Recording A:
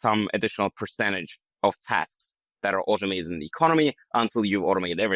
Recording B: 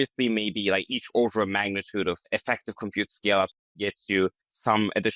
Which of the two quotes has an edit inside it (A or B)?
B